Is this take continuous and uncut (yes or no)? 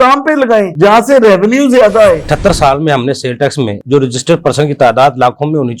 no